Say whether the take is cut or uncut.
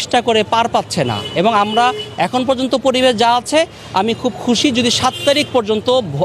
uncut